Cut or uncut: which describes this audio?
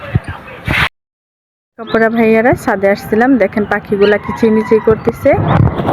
cut